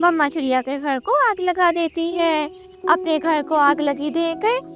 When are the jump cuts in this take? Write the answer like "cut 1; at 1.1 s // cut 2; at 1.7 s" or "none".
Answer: cut 1; at 2.6 s